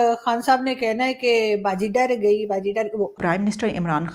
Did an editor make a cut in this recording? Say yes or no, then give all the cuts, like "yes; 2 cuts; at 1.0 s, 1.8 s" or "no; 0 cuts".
yes; 1 cut; at 3.1 s